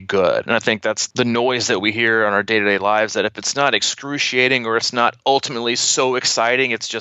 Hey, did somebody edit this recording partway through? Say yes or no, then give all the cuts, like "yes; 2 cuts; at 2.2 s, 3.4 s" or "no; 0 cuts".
yes; 1 cut; at 1.0 s